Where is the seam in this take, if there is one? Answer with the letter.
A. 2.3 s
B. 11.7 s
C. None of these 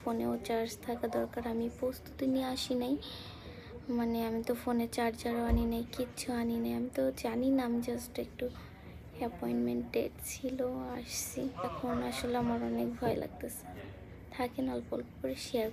B